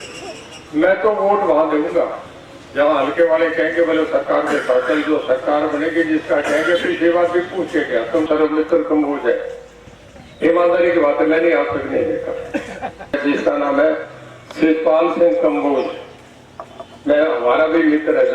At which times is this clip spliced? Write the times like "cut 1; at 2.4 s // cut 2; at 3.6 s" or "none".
cut 1; at 8.3 s // cut 2; at 13.2 s